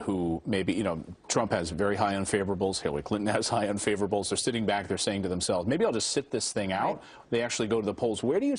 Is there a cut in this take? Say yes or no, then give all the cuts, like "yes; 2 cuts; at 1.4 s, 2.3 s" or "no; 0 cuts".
no; 0 cuts